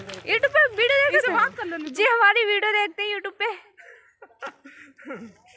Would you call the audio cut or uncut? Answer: uncut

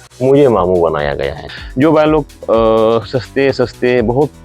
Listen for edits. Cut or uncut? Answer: cut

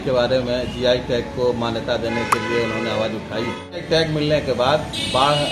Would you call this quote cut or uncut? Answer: cut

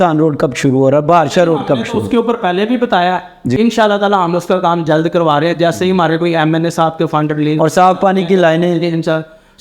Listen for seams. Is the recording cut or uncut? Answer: cut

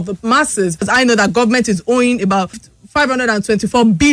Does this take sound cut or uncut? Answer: cut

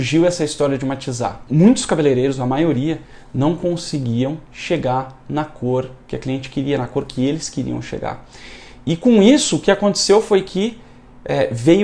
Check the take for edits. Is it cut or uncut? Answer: cut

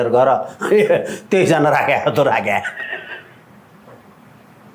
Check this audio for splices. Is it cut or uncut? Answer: uncut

